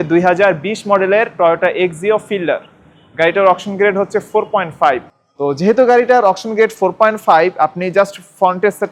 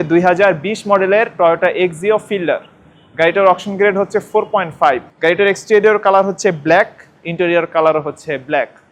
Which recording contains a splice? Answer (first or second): first